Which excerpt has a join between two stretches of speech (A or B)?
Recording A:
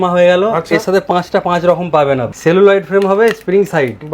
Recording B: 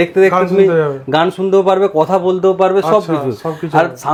A